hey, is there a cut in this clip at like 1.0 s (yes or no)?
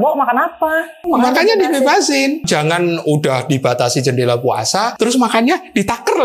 yes